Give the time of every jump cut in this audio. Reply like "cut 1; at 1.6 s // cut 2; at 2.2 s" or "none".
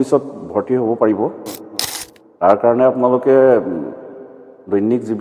none